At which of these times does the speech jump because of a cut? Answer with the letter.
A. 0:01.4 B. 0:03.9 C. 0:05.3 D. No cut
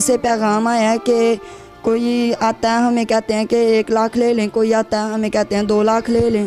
D